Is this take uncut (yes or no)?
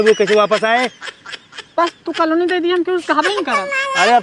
yes